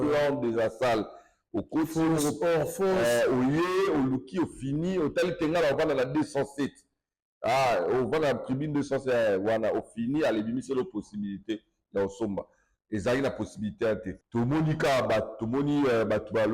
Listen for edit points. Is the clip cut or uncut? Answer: cut